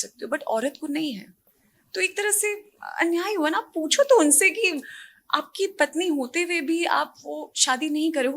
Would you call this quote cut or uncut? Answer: uncut